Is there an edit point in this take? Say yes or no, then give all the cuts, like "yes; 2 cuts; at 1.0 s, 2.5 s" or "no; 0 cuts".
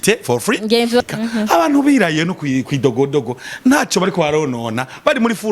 yes; 1 cut; at 1.0 s